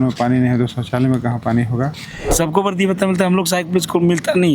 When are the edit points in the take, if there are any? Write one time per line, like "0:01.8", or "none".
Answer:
0:02.3